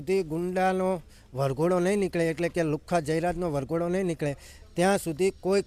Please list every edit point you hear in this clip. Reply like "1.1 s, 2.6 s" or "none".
none